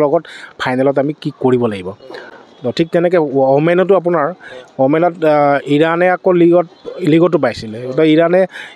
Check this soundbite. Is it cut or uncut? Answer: uncut